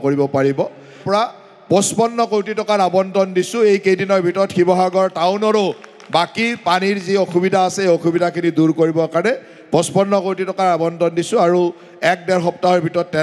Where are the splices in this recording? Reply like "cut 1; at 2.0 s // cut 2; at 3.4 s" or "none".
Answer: cut 1; at 1.0 s